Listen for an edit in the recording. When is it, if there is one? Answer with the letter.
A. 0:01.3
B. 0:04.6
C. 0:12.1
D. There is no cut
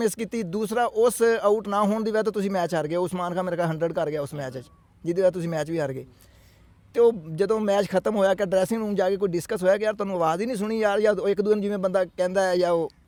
D